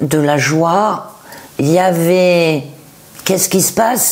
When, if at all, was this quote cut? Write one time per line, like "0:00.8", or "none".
none